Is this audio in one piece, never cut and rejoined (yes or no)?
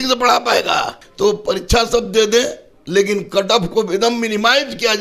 no